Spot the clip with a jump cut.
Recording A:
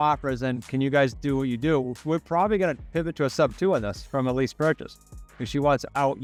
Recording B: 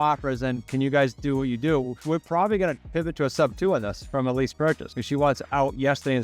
B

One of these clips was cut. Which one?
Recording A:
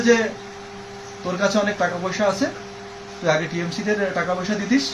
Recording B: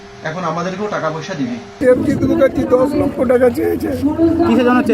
B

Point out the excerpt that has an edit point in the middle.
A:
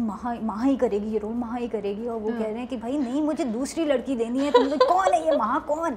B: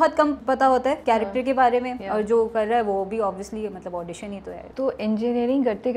B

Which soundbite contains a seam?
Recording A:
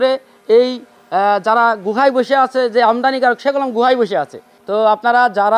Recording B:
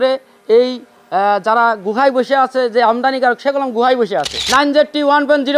B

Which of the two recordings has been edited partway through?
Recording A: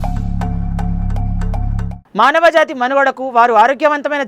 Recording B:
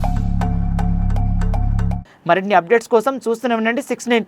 A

